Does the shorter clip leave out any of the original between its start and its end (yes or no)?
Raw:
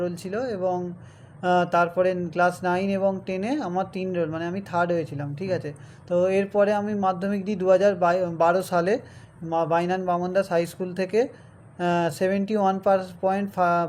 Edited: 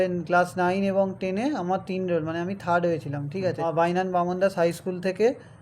yes